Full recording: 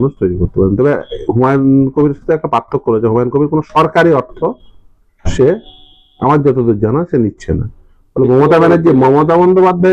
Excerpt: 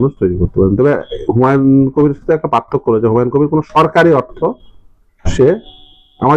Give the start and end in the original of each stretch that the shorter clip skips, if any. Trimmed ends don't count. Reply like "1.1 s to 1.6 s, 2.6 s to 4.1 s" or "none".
none

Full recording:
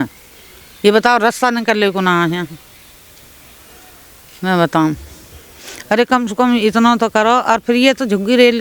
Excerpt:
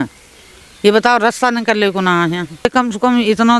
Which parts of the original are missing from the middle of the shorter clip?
2.6 s to 6.0 s

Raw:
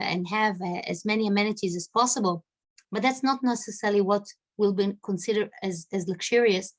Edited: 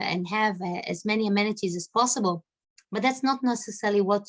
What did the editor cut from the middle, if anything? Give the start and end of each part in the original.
none

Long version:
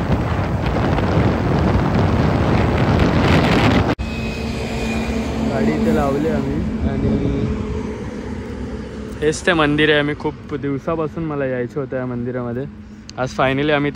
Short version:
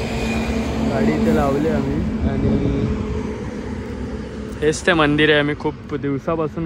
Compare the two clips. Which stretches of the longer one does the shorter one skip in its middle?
none

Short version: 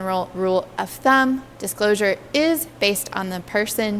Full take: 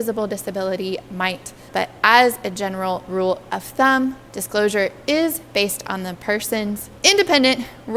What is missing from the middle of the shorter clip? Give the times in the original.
none

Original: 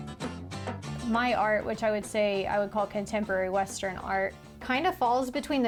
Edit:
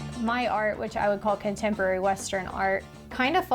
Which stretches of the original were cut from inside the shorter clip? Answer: 1.8 s to 2.4 s

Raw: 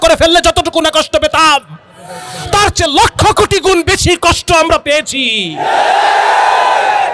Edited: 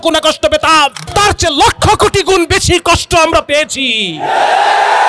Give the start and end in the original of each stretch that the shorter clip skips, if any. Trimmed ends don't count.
1.7 s to 2.4 s

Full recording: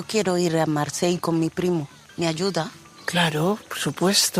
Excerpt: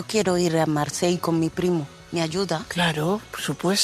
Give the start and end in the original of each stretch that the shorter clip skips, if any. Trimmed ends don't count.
2.2 s to 2.6 s

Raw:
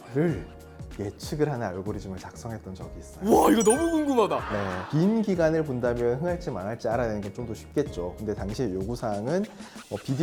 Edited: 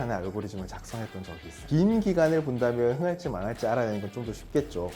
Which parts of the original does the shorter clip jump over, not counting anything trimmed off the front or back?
3.1 s to 4.8 s

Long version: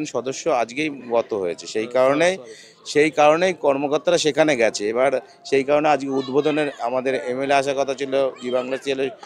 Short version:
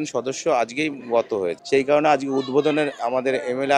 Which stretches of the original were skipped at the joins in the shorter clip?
1.6 s to 5.4 s

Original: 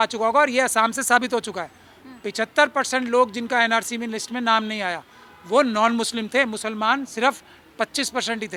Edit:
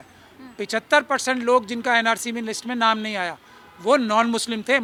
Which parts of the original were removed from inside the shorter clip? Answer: none

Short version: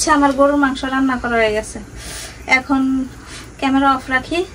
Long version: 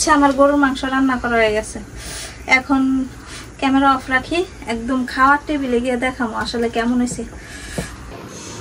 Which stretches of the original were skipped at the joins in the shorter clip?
none

